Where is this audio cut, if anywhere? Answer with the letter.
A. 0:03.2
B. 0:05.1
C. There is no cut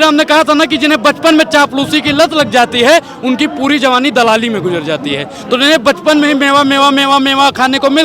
C